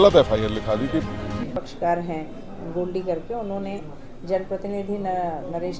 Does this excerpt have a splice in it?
yes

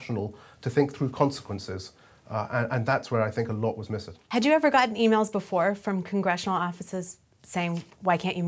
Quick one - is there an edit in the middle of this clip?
no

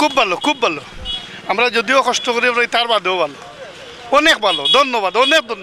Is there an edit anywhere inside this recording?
no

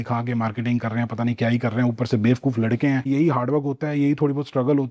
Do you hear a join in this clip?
yes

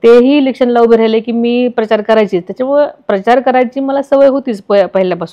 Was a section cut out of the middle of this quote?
no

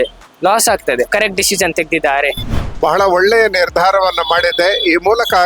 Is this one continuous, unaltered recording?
no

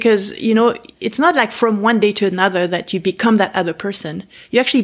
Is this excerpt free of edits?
yes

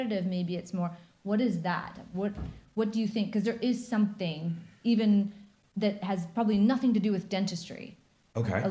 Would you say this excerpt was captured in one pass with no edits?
yes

